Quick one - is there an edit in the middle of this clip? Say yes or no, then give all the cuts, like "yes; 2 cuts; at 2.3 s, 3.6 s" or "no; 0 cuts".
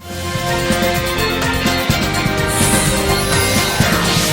no; 0 cuts